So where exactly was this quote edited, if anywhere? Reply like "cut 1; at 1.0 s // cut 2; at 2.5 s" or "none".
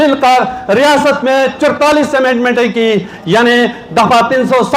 none

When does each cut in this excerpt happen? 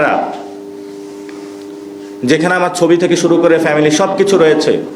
none

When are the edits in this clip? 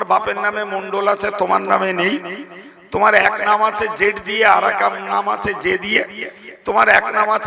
none

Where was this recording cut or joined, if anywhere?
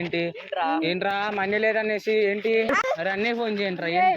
cut 1; at 2.9 s

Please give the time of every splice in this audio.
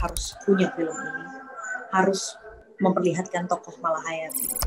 none

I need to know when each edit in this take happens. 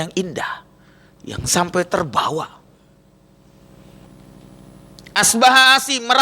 cut 1; at 4.1 s

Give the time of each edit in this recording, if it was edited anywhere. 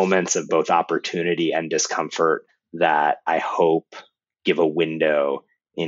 cut 1; at 2.5 s

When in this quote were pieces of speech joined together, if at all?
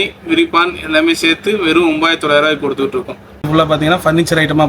cut 1; at 3.5 s

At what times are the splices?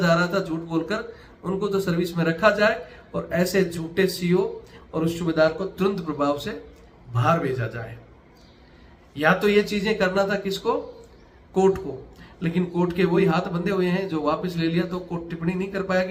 none

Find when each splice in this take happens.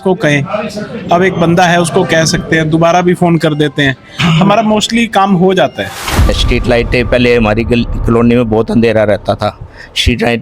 cut 1; at 6.3 s

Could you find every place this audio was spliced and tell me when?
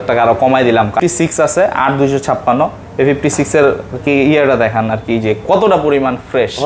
cut 1; at 1.0 s

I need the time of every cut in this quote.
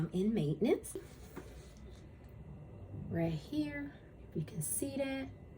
cut 1; at 1.2 s

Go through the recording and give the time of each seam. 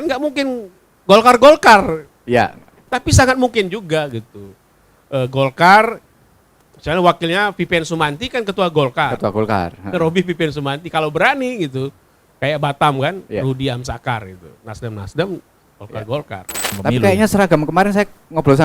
cut 1; at 16.7 s

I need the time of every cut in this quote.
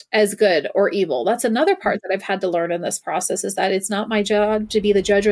none

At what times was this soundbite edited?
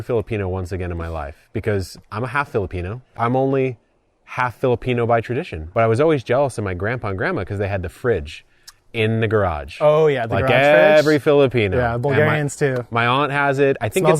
cut 1; at 3.2 s // cut 2; at 5.6 s

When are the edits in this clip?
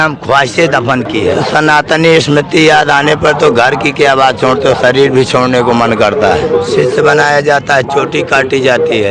cut 1; at 1.3 s // cut 2; at 6.4 s

